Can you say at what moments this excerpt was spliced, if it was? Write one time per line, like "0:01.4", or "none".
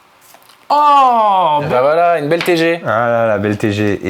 0:01.7